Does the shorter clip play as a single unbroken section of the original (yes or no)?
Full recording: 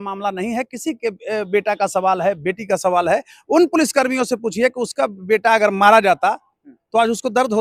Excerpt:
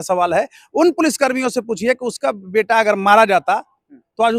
yes